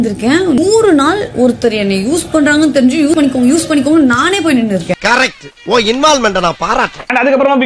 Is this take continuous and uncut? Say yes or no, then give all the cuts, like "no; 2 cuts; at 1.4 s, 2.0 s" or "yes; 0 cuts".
yes; 0 cuts